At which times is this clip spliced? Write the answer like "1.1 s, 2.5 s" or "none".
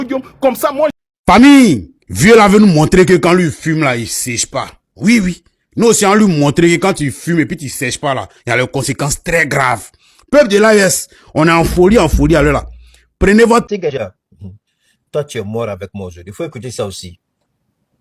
1.0 s, 13.7 s

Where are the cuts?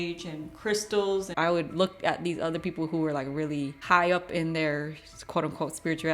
1.3 s

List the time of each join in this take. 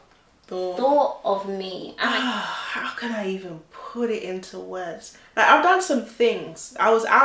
2.0 s

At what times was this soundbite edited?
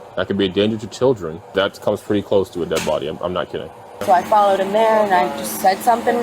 1.5 s, 3.9 s

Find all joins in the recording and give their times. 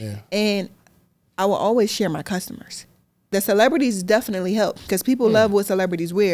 3.3 s

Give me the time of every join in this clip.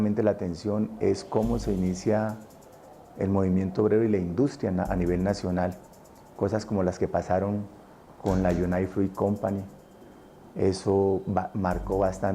3.7 s

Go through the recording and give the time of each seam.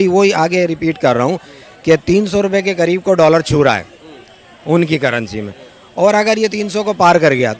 none

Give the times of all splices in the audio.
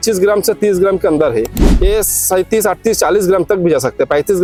none

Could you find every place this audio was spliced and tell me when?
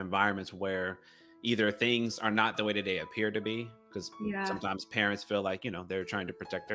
none

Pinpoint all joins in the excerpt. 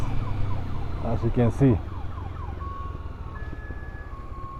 none

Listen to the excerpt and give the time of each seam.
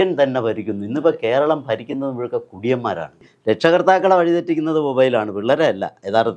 3.2 s

